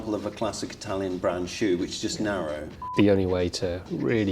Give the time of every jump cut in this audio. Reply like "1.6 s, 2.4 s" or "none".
2.8 s